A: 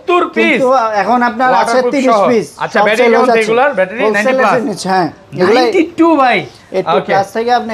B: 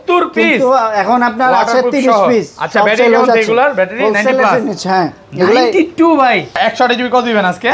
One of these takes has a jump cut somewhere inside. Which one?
B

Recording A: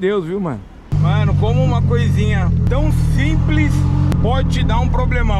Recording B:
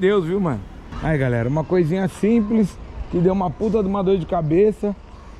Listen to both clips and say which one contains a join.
A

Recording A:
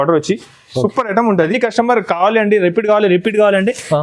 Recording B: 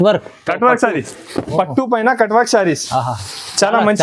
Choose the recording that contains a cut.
A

